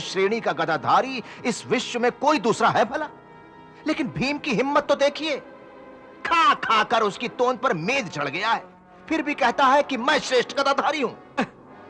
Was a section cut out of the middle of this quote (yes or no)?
no